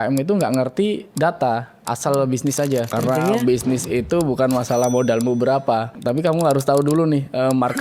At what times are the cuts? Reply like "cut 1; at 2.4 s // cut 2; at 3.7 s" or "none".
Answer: cut 1; at 1.1 s // cut 2; at 2.9 s // cut 3; at 5.9 s